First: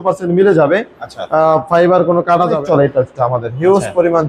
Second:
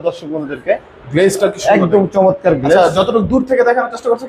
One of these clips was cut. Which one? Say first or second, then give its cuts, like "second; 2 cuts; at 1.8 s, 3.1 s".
first; 1 cut; at 2.6 s